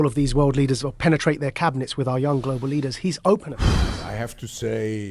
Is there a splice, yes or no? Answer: yes